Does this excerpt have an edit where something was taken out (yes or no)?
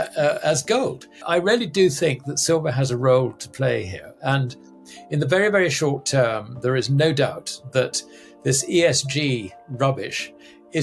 yes